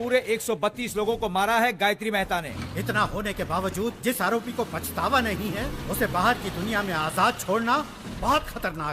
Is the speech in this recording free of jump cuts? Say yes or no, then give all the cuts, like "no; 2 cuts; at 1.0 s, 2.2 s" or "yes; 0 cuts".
no; 1 cut; at 2.5 s